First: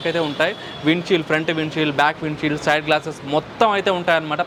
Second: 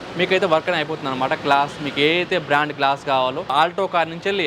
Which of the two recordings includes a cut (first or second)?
second